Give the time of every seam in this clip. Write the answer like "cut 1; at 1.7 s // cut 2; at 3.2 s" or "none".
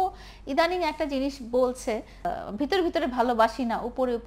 cut 1; at 2.2 s